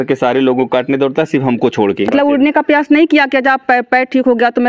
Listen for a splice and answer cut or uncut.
cut